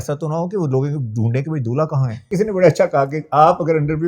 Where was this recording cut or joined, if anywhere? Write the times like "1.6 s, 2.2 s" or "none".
2.3 s